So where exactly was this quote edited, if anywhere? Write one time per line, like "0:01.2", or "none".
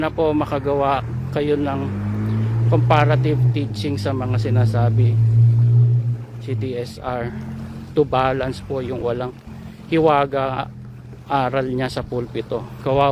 none